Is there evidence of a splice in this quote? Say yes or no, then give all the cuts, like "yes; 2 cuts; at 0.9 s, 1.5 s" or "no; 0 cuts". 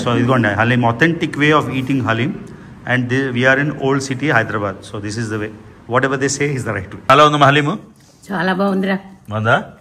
yes; 1 cut; at 6.9 s